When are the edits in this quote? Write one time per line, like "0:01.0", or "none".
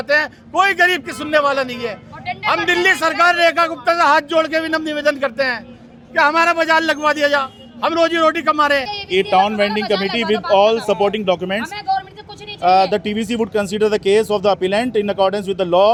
none